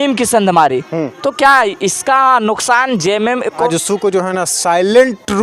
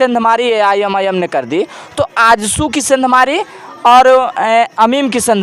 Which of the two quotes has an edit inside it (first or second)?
first